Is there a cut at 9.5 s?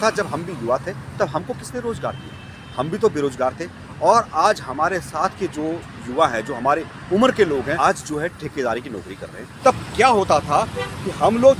yes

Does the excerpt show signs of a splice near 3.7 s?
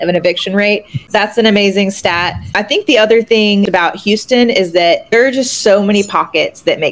yes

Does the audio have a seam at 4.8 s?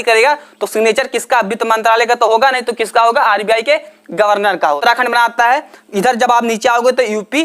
yes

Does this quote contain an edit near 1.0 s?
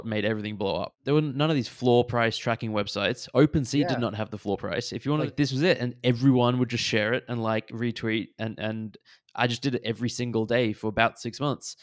yes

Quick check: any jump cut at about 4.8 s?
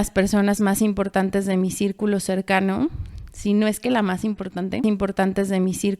yes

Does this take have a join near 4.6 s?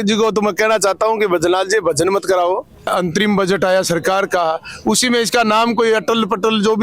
no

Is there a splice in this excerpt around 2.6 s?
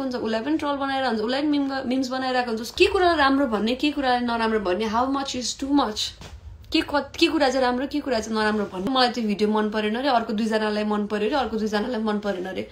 yes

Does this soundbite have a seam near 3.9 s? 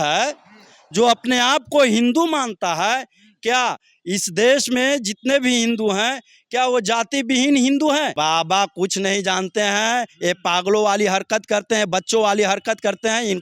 no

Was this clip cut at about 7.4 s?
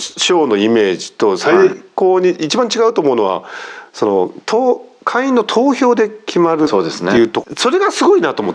yes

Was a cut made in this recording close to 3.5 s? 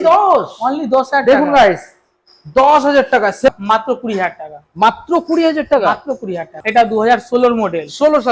yes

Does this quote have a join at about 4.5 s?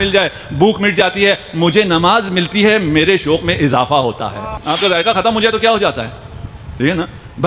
yes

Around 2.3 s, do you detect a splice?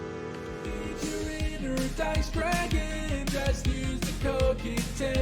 no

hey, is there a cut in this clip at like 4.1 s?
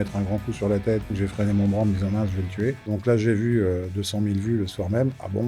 no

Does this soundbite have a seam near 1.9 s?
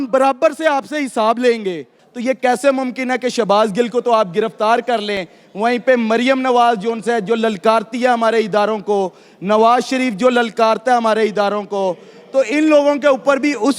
yes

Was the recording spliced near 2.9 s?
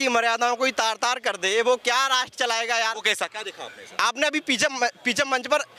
no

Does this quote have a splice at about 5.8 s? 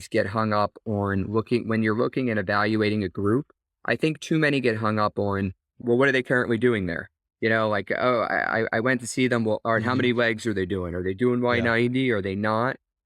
yes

